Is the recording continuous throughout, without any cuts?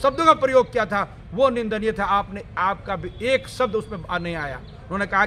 yes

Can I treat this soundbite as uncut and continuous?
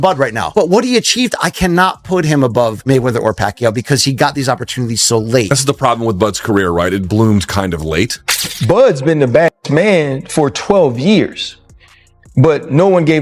no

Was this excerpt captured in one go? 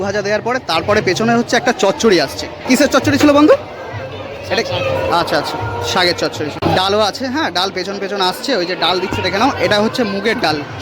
no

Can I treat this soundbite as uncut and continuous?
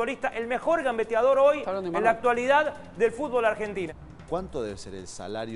no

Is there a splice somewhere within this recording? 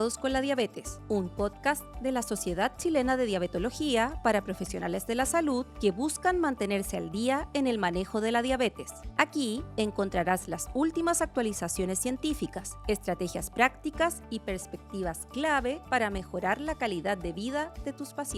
no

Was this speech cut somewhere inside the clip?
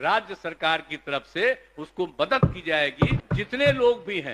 yes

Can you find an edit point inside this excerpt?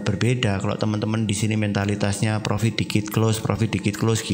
no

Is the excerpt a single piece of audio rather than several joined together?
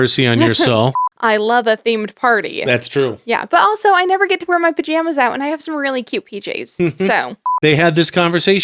no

